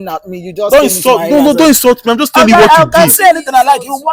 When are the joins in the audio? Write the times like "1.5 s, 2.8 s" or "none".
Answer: none